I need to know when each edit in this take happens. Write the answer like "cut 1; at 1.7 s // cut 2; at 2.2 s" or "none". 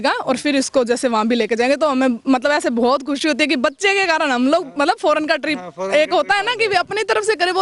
none